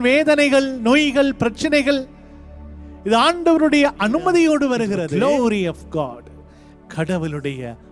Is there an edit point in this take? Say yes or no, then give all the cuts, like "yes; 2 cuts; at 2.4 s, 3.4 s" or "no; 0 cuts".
yes; 1 cut; at 5.0 s